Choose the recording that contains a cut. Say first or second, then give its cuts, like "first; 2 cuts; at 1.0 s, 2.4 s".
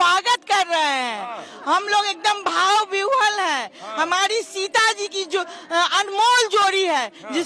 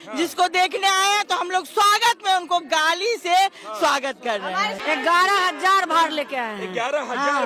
second; 1 cut; at 4.8 s